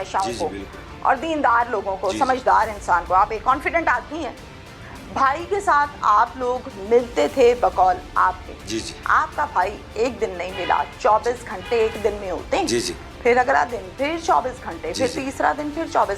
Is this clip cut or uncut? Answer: uncut